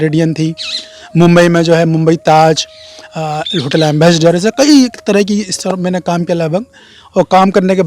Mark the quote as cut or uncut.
uncut